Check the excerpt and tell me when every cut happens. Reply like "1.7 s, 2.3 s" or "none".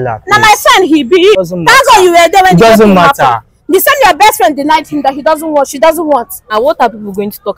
1.4 s, 6.5 s